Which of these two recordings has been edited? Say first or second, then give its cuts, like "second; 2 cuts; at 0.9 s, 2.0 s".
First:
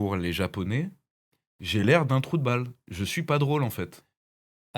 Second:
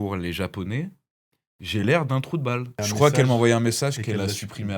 second; 1 cut; at 2.8 s